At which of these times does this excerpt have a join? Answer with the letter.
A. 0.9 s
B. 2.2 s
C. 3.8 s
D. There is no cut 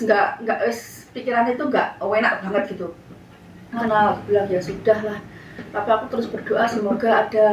C